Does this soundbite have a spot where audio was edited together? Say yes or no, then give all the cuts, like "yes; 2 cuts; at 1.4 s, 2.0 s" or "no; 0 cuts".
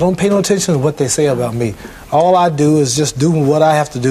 no; 0 cuts